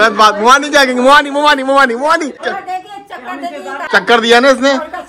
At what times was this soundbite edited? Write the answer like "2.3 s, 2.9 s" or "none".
2.4 s, 3.9 s